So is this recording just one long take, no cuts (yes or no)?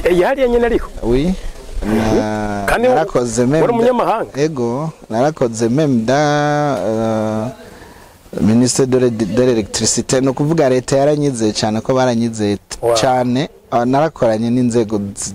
yes